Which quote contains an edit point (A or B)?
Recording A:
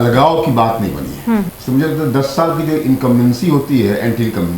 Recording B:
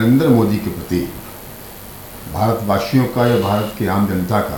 A